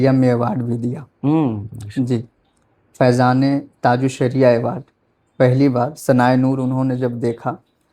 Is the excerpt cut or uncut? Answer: uncut